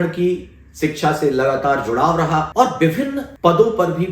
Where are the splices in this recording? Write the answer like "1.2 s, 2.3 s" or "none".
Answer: 2.5 s, 3.2 s